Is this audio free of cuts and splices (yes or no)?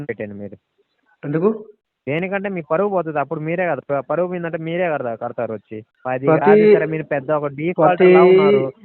no